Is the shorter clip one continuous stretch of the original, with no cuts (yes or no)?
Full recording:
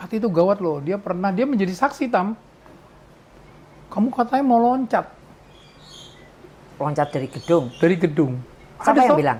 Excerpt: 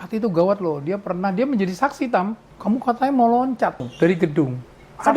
no